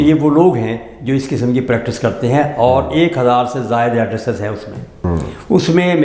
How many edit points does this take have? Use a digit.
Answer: 1